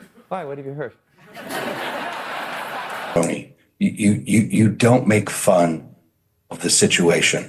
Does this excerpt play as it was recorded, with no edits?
no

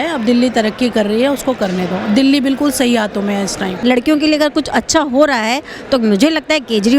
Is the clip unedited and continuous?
no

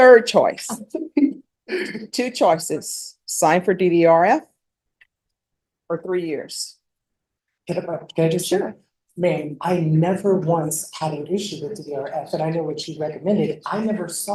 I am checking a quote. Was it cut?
no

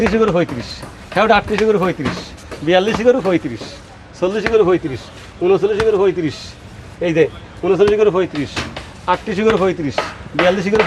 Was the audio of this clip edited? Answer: no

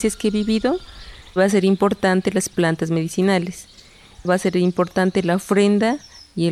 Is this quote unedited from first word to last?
no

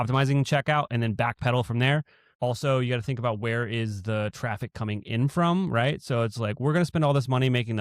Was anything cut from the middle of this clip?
yes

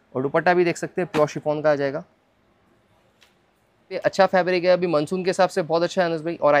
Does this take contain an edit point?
yes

